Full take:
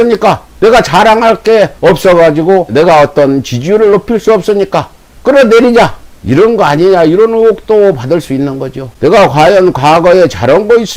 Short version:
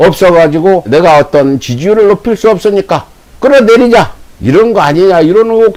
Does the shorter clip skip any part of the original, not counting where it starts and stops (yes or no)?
no